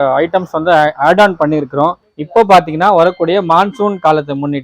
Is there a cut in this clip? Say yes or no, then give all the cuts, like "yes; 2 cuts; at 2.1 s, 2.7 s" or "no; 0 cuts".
yes; 1 cut; at 2.1 s